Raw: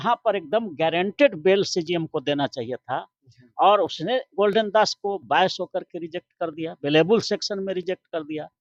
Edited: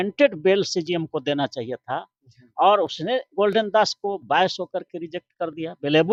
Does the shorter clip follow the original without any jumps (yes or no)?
yes